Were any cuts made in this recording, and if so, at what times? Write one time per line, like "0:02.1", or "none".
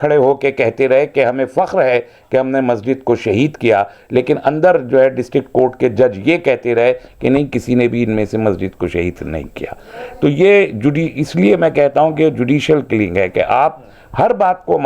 none